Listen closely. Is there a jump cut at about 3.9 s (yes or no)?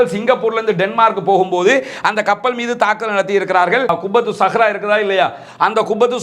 yes